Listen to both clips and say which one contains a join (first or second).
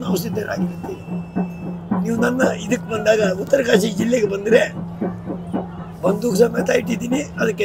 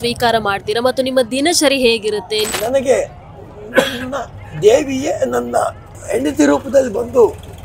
second